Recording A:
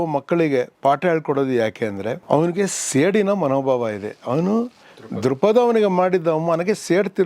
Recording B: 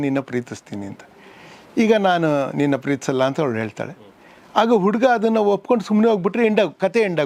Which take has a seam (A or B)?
A